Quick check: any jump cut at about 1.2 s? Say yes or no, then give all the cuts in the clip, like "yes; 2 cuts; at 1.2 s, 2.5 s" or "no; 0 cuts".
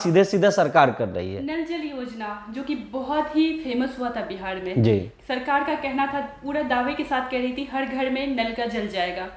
no; 0 cuts